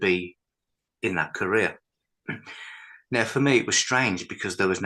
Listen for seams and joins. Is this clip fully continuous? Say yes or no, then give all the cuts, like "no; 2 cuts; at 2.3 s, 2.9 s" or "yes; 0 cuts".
yes; 0 cuts